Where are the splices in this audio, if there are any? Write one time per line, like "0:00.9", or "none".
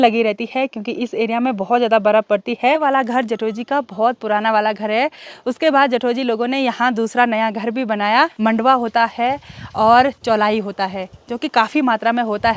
0:02.8
0:08.3